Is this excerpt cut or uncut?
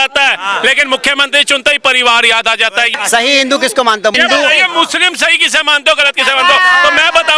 cut